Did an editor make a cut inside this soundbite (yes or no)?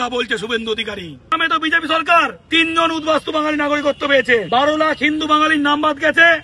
yes